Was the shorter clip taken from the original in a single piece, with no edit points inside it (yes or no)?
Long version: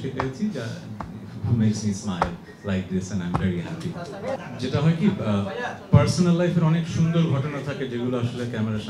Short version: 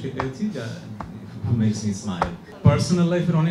no